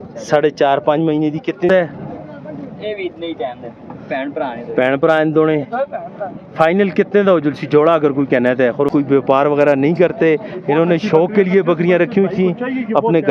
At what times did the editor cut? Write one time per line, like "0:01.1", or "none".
0:01.7
0:08.9